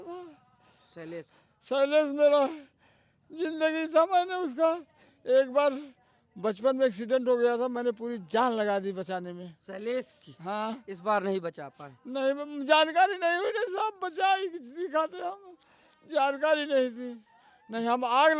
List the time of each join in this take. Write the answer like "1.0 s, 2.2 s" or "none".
none

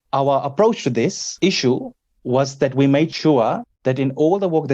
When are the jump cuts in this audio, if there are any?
1.2 s, 3.1 s, 3.7 s

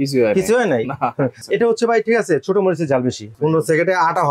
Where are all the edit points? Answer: 1.4 s, 3.3 s

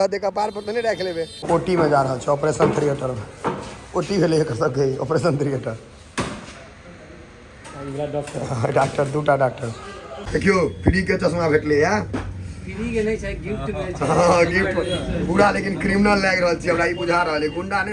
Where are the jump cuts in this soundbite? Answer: 1.4 s, 10.2 s

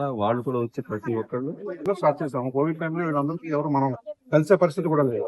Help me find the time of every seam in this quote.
1.8 s

